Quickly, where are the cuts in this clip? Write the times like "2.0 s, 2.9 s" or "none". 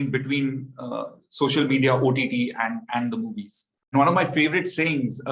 3.9 s